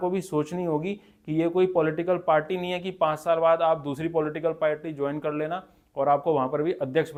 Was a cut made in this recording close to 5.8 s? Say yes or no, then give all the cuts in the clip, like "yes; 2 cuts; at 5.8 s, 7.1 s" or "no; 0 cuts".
no; 0 cuts